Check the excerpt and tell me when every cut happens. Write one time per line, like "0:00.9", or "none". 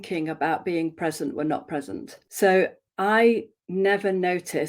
0:02.2
0:03.6

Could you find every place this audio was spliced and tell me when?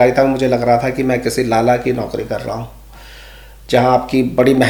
none

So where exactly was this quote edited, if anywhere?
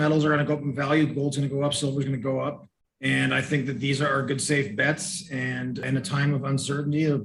0:05.8

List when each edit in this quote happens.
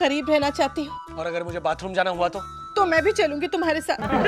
none

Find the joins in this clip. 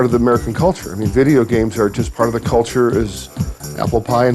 0:02.0

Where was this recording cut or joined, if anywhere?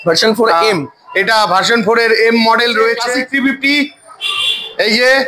0:03.1

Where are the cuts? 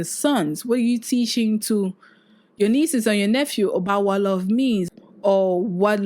0:04.9

